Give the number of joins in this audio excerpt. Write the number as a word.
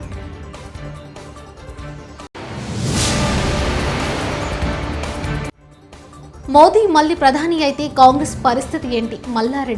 zero